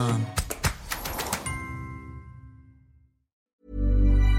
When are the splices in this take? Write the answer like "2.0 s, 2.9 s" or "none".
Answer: 3.4 s